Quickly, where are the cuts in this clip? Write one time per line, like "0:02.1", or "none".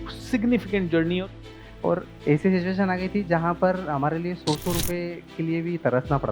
0:01.3